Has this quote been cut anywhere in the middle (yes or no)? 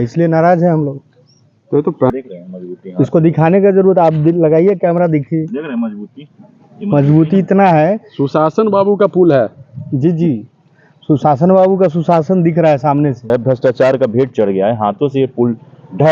yes